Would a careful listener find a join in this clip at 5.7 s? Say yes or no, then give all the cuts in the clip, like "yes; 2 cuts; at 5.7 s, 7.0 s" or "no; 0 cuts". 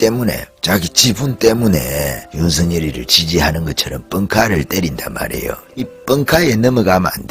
yes; 2 cuts; at 2.2 s, 5.7 s